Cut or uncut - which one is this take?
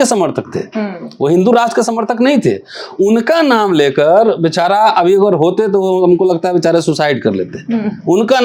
uncut